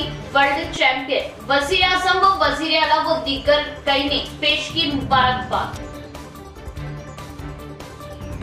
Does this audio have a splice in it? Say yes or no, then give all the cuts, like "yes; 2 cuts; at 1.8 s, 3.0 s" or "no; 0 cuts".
no; 0 cuts